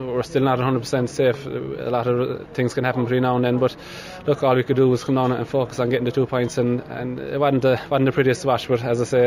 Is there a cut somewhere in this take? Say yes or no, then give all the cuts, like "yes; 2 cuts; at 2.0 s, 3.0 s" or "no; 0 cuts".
no; 0 cuts